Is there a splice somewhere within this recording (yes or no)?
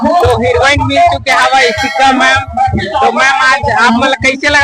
no